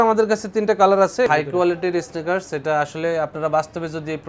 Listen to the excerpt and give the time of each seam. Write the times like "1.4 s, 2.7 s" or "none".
1.3 s

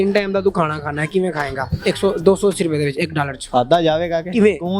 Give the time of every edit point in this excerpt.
none

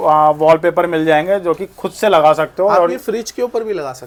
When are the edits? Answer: none

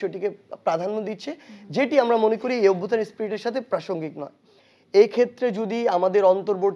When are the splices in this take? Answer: 4.4 s

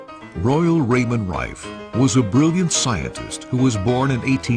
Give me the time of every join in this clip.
2.5 s

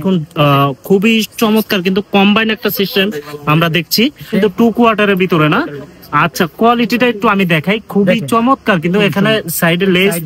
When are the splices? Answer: 4.3 s

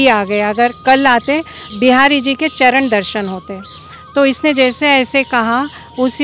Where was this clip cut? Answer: 1.6 s

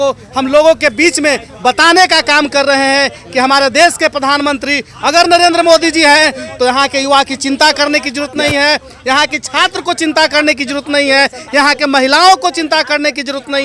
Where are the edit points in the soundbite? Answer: none

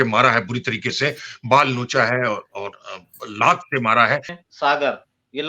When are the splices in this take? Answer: 4.3 s

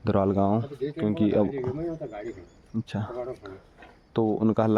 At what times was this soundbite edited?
none

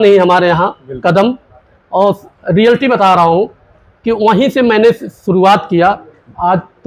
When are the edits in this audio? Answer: none

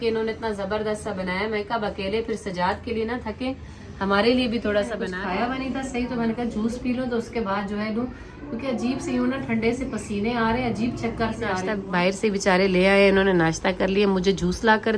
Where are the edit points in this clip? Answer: 5.0 s, 11.7 s

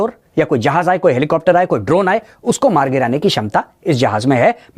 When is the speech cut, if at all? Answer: none

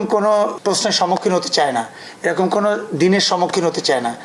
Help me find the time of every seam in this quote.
none

